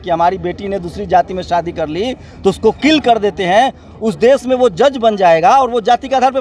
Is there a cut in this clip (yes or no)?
no